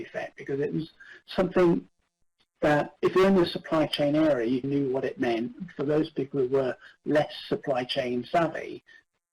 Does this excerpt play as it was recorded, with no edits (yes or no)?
no